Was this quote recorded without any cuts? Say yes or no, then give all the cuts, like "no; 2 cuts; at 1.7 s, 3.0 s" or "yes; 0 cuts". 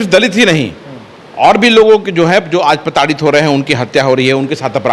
yes; 0 cuts